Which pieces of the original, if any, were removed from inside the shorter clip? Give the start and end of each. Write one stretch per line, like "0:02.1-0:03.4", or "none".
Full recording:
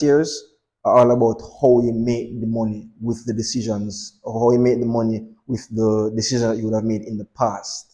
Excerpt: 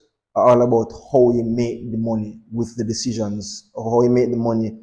none